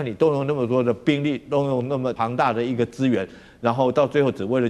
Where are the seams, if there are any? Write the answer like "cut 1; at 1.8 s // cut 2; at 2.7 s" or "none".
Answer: cut 1; at 2.2 s